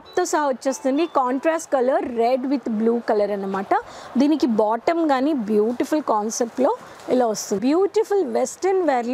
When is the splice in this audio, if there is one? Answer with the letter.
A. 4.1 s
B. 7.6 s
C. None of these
B